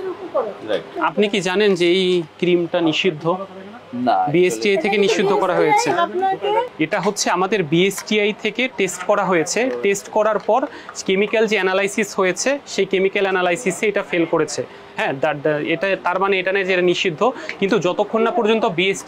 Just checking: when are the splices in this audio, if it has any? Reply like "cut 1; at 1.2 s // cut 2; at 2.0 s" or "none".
cut 1; at 0.9 s // cut 2; at 6.7 s

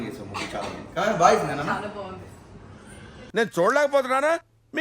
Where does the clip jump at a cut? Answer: cut 1; at 3.2 s

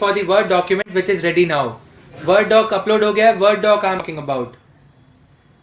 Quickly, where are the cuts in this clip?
cut 1; at 4.0 s

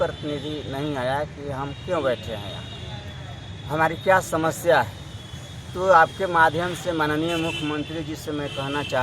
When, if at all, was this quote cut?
none

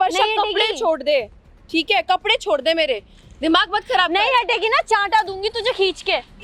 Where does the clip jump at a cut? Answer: none

